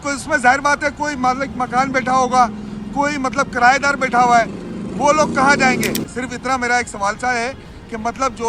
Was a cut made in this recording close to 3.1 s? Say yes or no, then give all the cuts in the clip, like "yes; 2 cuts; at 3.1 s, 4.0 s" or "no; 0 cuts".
no; 1 cut; at 6.1 s